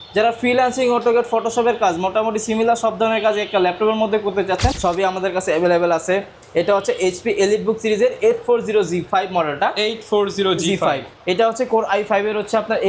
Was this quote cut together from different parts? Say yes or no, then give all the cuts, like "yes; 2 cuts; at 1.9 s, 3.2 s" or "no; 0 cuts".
yes; 1 cut; at 4.8 s